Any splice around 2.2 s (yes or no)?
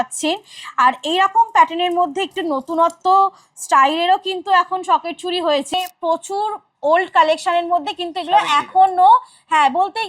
no